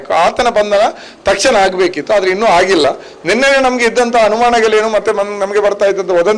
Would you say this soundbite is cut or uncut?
uncut